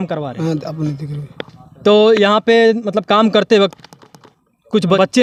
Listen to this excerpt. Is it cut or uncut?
uncut